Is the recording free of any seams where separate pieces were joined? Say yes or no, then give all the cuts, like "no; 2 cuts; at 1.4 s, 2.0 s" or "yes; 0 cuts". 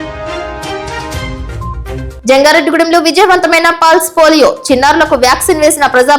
yes; 0 cuts